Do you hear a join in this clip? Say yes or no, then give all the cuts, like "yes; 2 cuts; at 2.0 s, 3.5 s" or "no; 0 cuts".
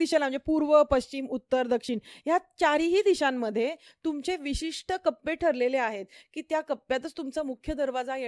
no; 0 cuts